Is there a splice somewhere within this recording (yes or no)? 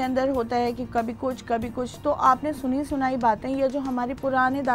no